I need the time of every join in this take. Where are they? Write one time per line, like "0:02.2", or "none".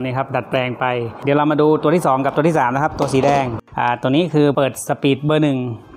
0:01.1
0:03.6
0:04.5